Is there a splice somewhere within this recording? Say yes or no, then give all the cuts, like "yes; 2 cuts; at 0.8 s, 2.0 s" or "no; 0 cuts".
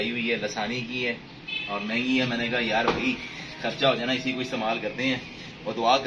no; 0 cuts